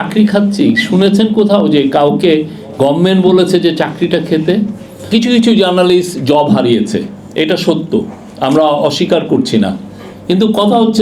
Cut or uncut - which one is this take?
cut